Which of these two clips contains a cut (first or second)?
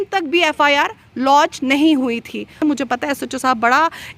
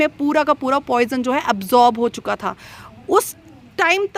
first